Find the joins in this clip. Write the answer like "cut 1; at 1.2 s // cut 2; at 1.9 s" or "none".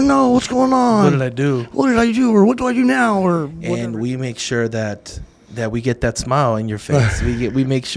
cut 1; at 3.6 s